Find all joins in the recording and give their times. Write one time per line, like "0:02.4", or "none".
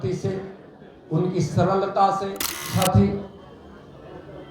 0:02.7